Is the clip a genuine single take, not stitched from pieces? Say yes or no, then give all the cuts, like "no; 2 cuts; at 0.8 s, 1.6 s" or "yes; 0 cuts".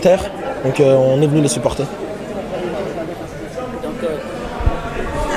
yes; 0 cuts